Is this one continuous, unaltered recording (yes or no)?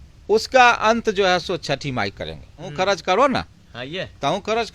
no